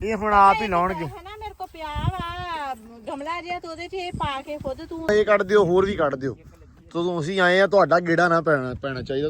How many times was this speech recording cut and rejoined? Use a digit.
1